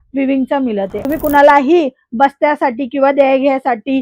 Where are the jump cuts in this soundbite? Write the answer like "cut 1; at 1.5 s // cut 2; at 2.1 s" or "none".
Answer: cut 1; at 1.0 s